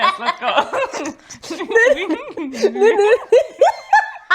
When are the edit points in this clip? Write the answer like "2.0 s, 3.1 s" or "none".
none